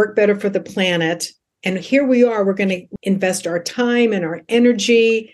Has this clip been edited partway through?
yes; 1 cut; at 2.9 s

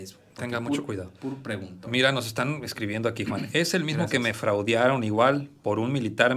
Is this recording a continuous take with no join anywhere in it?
yes; 0 cuts

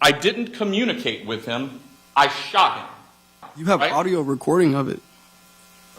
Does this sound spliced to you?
yes; 1 cut; at 3.5 s

